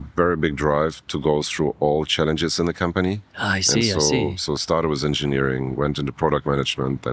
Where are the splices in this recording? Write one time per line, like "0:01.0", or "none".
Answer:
none